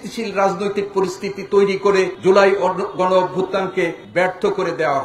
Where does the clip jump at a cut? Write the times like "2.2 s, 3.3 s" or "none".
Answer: 2.1 s, 4.0 s